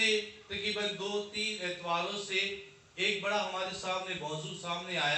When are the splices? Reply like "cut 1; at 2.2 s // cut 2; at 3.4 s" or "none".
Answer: none

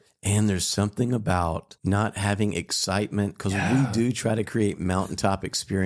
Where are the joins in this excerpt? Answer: cut 1; at 1.7 s

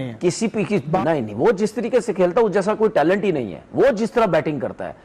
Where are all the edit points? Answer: cut 1; at 1.0 s

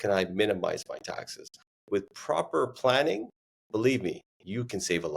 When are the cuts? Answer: cut 1; at 1.7 s

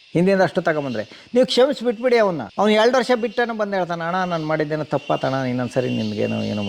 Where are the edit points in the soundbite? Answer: cut 1; at 2.4 s

